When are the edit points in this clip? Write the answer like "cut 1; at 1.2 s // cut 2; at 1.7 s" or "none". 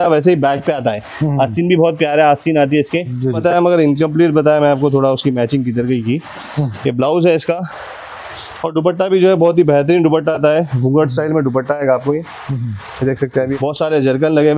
cut 1; at 3.4 s // cut 2; at 13.5 s